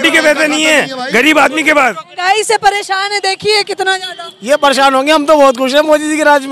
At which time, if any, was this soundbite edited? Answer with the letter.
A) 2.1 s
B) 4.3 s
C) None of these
A